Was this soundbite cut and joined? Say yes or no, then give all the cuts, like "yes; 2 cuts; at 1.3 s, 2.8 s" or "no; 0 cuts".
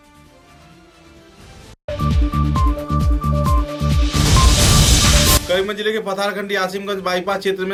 no; 0 cuts